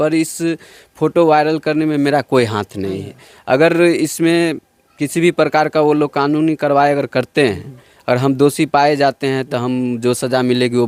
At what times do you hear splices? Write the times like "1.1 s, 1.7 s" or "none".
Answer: none